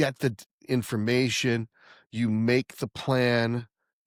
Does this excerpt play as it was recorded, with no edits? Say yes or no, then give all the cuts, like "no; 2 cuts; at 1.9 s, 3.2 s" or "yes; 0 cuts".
yes; 0 cuts